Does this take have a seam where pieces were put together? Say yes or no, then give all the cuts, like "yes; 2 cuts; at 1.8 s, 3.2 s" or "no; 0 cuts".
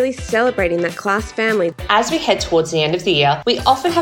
yes; 1 cut; at 1.8 s